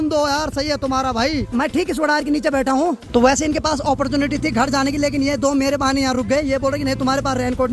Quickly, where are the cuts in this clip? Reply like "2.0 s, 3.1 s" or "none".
none